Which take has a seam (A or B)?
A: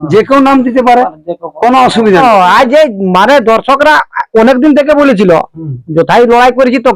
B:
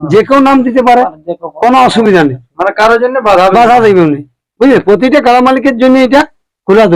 A